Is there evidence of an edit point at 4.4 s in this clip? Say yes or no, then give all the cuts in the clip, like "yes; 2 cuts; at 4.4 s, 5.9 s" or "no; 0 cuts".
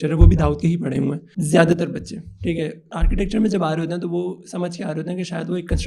no; 2 cuts; at 1.3 s, 2.9 s